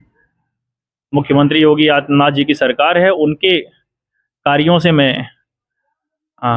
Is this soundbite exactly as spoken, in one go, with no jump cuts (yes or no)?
yes